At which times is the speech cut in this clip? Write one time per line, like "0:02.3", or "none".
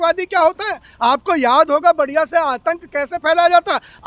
none